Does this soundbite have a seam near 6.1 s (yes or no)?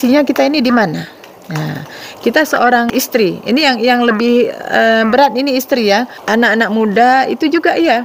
yes